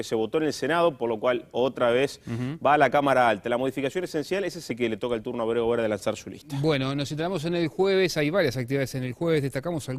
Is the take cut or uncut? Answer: uncut